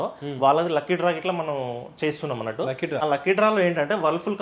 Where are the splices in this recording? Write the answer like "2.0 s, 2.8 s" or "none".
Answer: 3.0 s